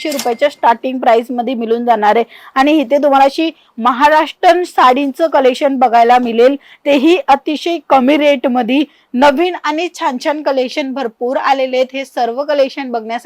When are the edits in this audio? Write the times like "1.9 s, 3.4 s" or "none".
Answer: none